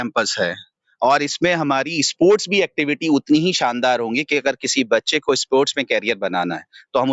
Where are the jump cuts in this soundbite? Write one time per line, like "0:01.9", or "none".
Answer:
none

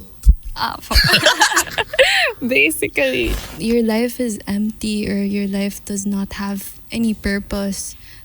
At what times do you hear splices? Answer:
0:03.4

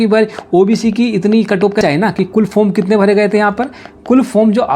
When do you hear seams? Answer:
0:01.8

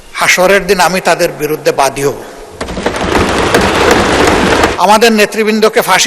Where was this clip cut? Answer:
0:04.7

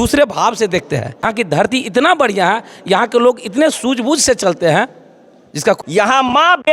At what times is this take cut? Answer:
0:01.2
0:05.8

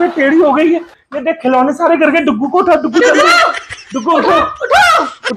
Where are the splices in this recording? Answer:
none

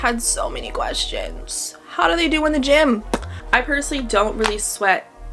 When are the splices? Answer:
0:03.3

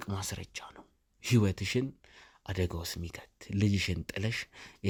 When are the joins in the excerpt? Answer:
none

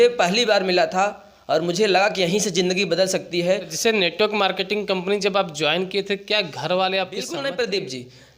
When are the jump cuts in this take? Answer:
0:03.7
0:07.3

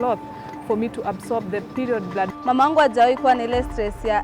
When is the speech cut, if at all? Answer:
0:02.3

